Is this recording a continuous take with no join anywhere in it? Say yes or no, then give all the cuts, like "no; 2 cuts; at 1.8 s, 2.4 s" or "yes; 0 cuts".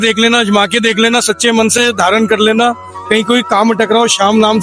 yes; 0 cuts